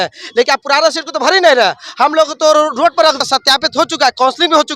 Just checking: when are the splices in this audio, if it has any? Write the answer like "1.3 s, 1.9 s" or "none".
3.2 s